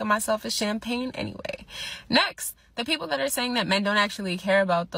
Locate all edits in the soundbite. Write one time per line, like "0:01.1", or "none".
0:01.8